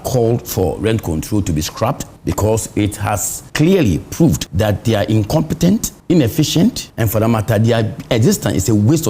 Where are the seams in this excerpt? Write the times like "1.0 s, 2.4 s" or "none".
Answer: 2.1 s, 3.4 s, 4.5 s, 5.9 s, 6.9 s

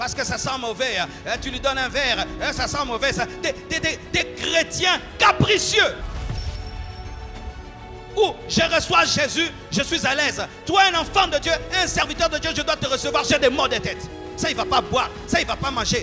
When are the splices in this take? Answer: none

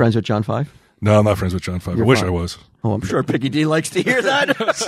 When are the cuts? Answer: 3.1 s

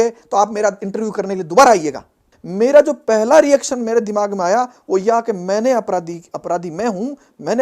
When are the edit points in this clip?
2.3 s

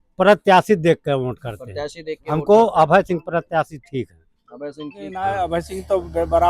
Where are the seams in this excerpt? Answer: 5.1 s

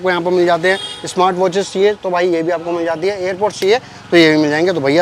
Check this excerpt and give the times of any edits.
none

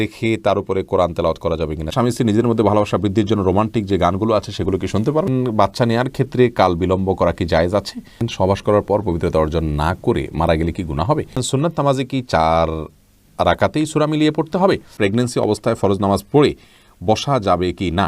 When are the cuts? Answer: 1.8 s, 5.3 s, 8.2 s, 11.4 s, 14.9 s

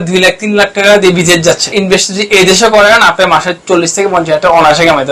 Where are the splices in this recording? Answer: 1.7 s

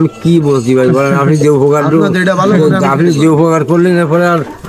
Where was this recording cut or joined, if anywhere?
none

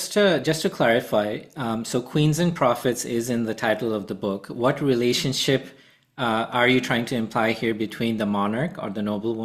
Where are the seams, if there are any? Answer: none

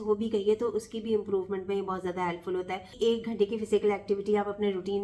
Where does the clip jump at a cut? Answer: 2.9 s

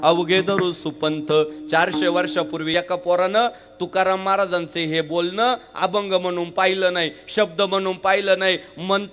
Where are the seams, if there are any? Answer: 2.7 s

